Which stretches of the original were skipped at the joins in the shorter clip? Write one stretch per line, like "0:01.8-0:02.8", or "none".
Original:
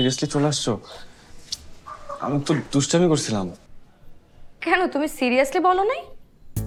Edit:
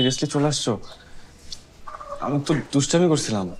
none